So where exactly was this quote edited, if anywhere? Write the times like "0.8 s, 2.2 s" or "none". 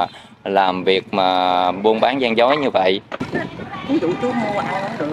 3.4 s